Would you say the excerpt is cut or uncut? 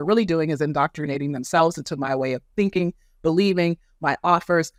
uncut